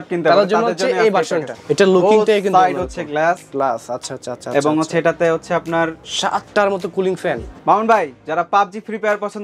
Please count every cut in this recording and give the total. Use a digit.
3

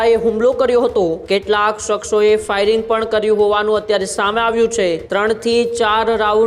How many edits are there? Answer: 2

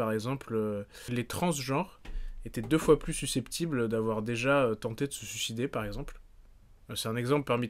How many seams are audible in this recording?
1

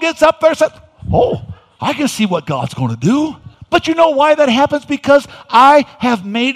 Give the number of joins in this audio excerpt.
1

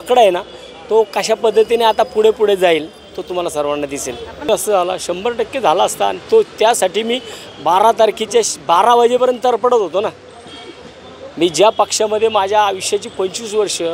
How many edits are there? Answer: 1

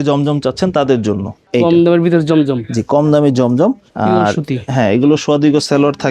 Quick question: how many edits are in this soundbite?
0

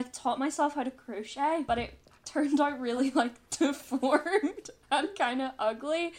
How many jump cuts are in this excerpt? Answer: 1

